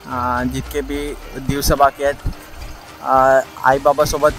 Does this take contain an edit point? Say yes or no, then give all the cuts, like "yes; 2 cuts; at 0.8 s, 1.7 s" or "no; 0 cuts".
no; 0 cuts